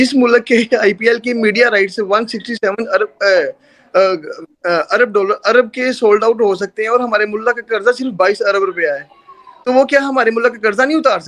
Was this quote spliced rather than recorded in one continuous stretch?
no; 0 cuts

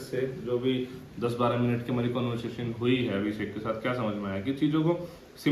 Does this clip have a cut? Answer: no; 0 cuts

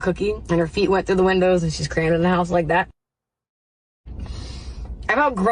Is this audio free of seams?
yes; 0 cuts

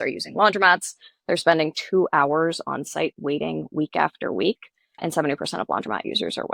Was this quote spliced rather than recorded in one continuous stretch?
no; 0 cuts

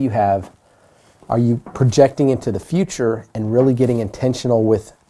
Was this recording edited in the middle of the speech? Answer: no; 0 cuts

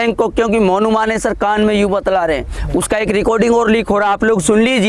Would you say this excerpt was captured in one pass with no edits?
yes; 0 cuts

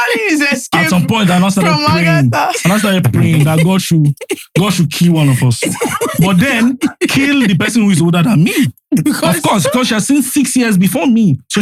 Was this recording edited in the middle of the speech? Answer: no; 0 cuts

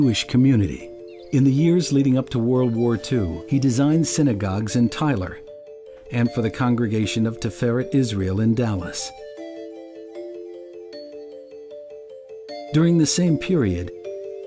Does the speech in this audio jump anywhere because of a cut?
yes; 1 cut; at 8.0 s

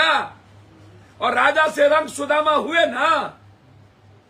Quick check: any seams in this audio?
no; 0 cuts

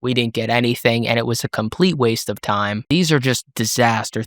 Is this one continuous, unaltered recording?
no; 1 cut; at 2.9 s

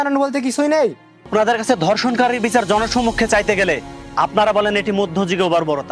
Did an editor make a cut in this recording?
yes; 1 cut; at 1.3 s

